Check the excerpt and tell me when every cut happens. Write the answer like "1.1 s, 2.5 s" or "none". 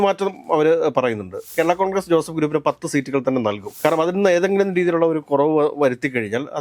1.5 s